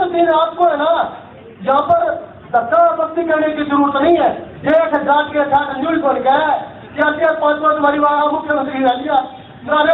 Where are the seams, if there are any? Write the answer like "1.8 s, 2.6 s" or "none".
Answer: 4.5 s